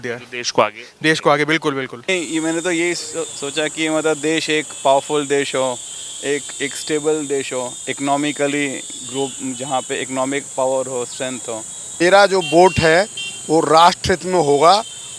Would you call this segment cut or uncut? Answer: cut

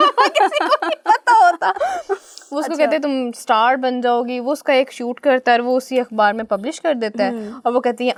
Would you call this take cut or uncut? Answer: uncut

